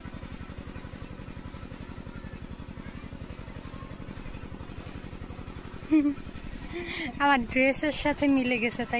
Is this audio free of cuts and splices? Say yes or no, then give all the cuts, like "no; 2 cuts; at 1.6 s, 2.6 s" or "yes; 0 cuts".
yes; 0 cuts